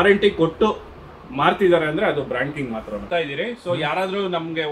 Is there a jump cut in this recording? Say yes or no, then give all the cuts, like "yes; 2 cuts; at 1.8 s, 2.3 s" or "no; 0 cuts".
yes; 1 cut; at 3.0 s